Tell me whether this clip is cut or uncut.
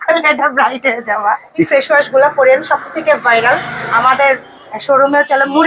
cut